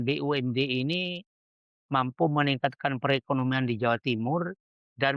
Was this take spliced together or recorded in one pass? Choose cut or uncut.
uncut